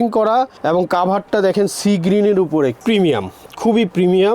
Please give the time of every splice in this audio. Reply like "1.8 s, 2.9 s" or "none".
2.8 s